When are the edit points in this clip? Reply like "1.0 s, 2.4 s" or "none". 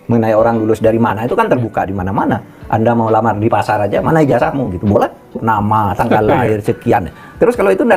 5.4 s

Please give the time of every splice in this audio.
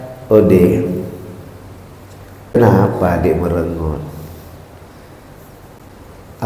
2.6 s

